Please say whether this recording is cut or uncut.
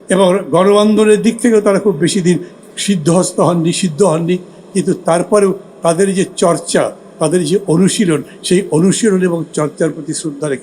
uncut